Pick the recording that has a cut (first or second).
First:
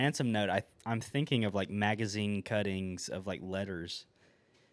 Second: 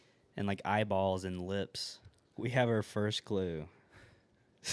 second